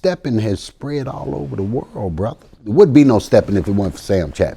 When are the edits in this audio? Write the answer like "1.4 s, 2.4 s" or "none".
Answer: 2.5 s